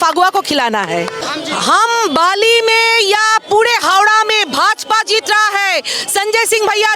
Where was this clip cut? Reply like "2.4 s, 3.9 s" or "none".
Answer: 1.2 s